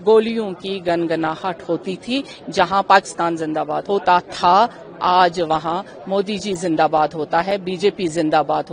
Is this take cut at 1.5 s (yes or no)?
no